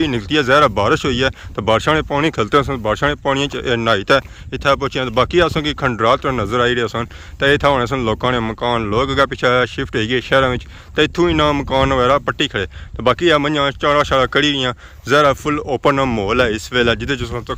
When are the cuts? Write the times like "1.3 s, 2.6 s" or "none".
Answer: none

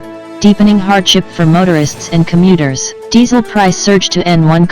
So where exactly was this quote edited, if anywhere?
2.9 s

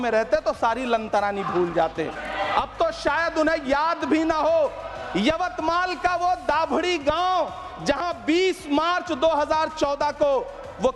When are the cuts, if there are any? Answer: 2.2 s

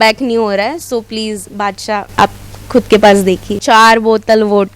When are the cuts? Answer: 3.6 s

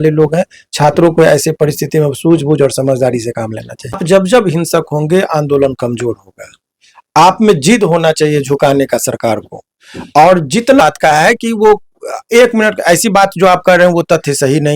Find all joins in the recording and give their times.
4.0 s, 10.8 s

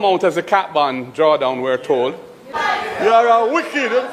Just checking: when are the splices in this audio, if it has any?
2.5 s

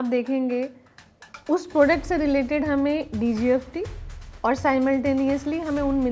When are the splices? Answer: none

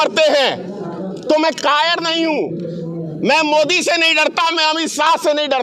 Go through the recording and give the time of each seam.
none

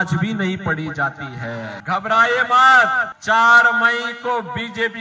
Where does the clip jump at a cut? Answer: 1.8 s

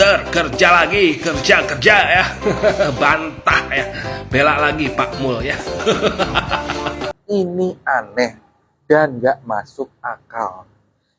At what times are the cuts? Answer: 7.2 s

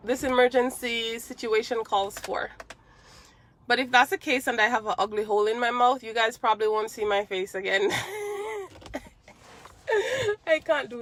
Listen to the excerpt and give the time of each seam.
none

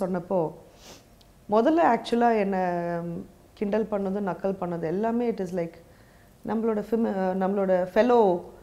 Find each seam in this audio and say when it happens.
none

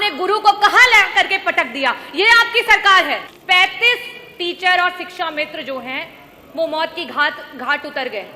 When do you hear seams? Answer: 3.3 s

